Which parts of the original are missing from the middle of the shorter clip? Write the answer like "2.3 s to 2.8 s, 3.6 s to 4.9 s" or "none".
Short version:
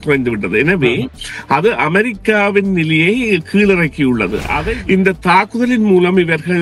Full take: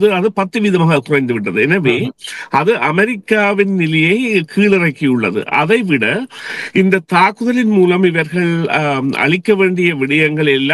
5.6 s to 6.4 s